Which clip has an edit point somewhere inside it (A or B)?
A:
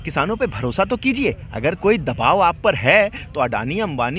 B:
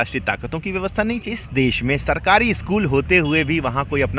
B